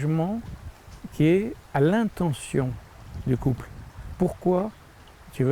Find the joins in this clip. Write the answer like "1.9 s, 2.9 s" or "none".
1.6 s